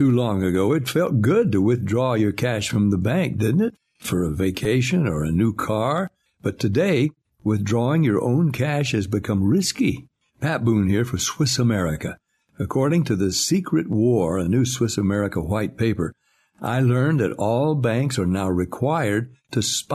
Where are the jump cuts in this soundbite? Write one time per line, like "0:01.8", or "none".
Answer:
none